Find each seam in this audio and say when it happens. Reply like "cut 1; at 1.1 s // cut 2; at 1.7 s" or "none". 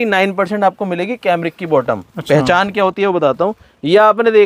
none